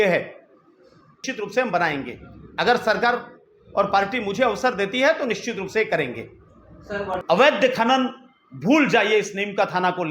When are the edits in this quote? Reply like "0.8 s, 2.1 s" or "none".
1.2 s, 7.2 s